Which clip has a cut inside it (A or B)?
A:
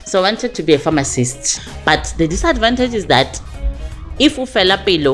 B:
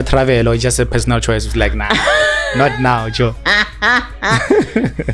A